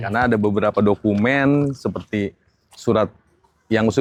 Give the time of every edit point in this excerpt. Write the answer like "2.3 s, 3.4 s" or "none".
none